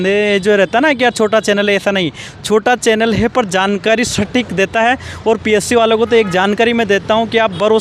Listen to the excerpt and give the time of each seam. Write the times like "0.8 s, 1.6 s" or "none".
none

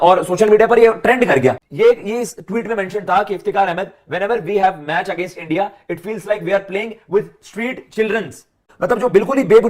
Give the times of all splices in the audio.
1.7 s, 8.7 s

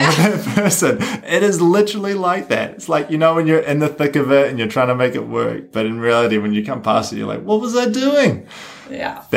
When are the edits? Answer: none

